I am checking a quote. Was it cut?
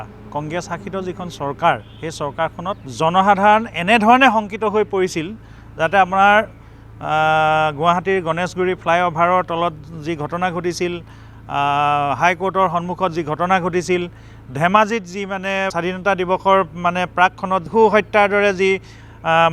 yes; 3 cuts; at 2.9 s, 15.7 s, 17.7 s

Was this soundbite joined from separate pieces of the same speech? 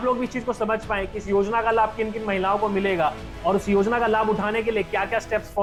no; 0 cuts

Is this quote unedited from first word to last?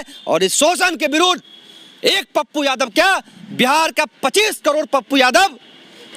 yes; 0 cuts

